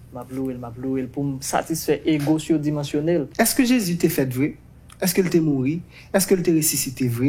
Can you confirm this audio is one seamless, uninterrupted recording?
no; 1 cut; at 3.3 s

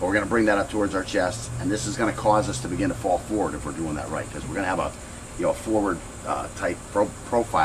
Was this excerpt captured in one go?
yes; 0 cuts

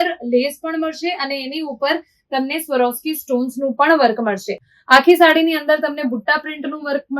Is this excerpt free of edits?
yes; 0 cuts

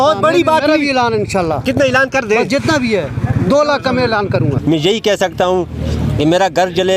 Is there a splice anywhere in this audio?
yes; 1 cut; at 4.6 s

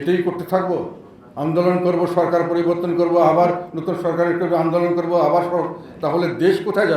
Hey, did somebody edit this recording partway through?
no; 0 cuts

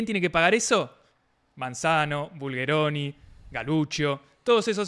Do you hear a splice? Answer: no; 0 cuts

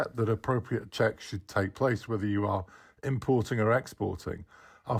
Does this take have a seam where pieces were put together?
no; 0 cuts

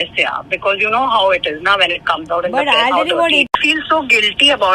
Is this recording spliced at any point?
yes; 1 cut; at 3.5 s

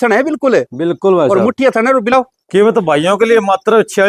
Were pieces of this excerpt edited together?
yes; 1 cut; at 2.1 s

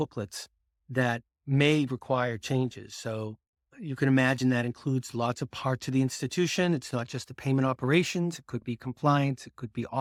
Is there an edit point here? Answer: no; 0 cuts

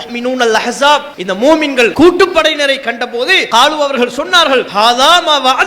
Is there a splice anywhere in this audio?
yes; 4 cuts; at 1.2 s, 1.9 s, 3.4 s, 4.7 s

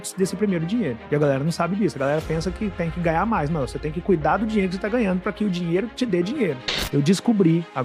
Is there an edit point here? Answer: yes; 1 cut; at 6.7 s

